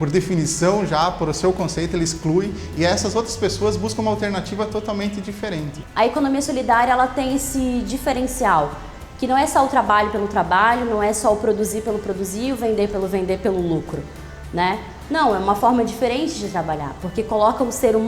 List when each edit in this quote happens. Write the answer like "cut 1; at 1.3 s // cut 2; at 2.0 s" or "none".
cut 1; at 5.8 s